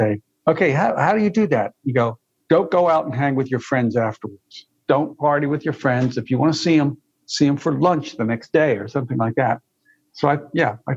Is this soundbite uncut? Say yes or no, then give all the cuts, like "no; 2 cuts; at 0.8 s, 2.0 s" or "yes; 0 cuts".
no; 1 cut; at 4.6 s